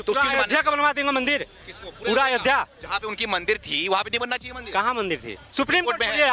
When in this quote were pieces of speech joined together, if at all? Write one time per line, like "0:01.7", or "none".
0:05.4